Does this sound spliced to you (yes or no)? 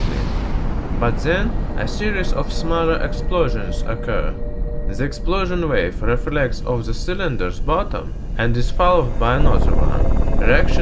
yes